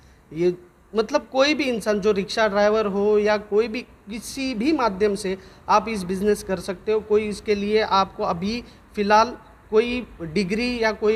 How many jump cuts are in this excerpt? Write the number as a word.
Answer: zero